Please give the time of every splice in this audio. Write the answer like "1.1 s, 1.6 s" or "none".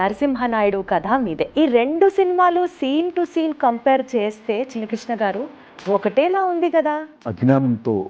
1.5 s, 7.2 s

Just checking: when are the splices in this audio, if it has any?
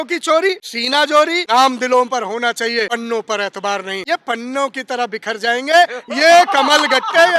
0.9 s, 2.9 s, 4.0 s

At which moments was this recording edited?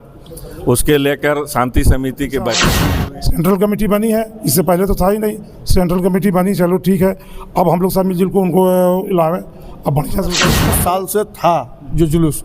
2.7 s, 10.6 s

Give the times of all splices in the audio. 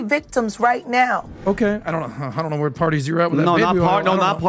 1.4 s

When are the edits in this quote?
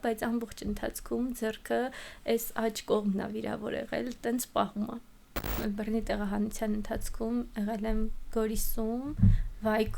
5.5 s

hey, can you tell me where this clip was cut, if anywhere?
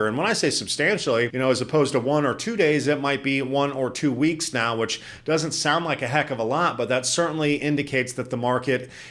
1.3 s

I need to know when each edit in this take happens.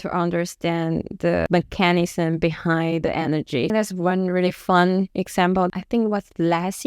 1.5 s, 3.7 s, 5.5 s

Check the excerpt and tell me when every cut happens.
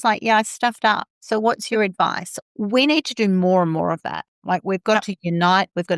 2.5 s, 4.3 s

